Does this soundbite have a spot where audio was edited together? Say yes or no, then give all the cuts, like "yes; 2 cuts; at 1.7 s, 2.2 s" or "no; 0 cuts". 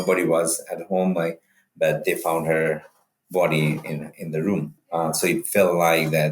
yes; 2 cuts; at 1.6 s, 4.8 s